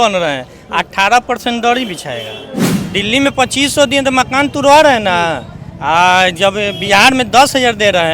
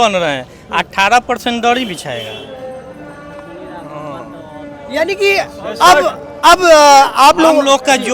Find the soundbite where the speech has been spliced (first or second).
first